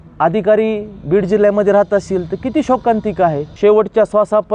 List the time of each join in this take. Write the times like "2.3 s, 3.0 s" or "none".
3.5 s

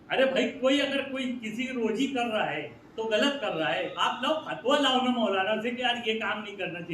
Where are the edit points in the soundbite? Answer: none

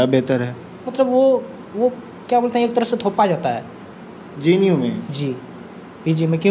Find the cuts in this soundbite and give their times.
0.9 s

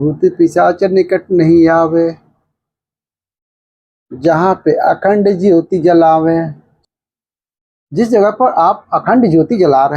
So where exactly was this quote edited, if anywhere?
6.7 s

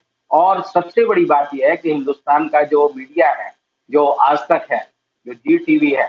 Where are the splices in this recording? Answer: none

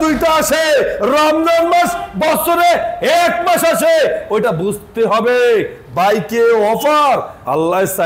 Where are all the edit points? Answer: none

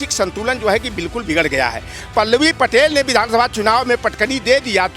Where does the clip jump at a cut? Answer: 1.9 s

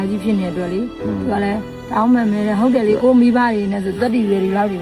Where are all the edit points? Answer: none

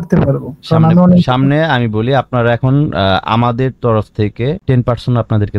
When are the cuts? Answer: 4.6 s

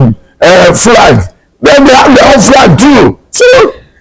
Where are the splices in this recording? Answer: none

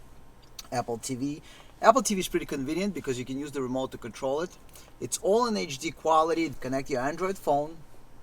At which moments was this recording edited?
6.6 s

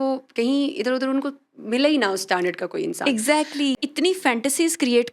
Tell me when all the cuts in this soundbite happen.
3.8 s

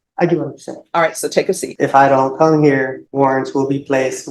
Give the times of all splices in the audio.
1.7 s, 3.0 s

